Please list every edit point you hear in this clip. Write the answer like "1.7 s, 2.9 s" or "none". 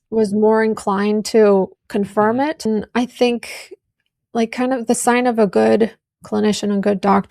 2.7 s